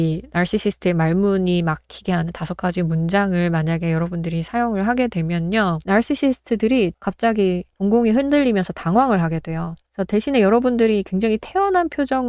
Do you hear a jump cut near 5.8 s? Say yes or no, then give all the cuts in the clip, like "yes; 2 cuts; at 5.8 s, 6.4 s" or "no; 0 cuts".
yes; 2 cuts; at 5.8 s, 7.0 s